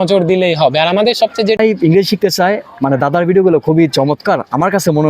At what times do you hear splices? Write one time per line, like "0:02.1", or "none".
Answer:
0:01.6